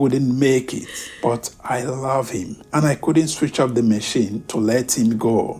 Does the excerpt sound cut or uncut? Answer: uncut